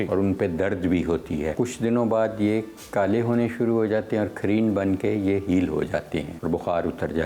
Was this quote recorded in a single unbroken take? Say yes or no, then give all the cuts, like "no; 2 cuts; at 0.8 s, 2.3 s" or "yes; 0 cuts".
no; 2 cuts; at 1.5 s, 6.3 s